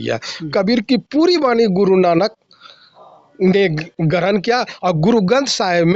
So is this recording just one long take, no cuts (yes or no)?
yes